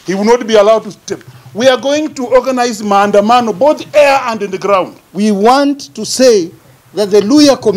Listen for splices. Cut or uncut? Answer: cut